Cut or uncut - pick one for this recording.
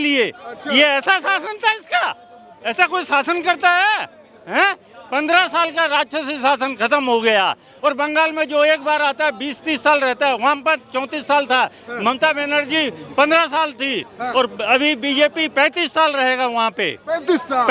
uncut